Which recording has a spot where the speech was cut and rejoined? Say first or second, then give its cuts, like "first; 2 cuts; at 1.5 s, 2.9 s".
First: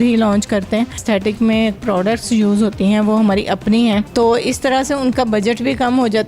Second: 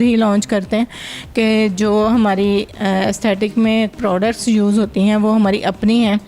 first; 2 cuts; at 1.0 s, 4.1 s